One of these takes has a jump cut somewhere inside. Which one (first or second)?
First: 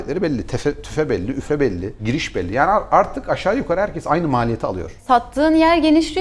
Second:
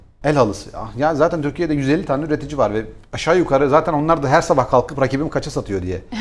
first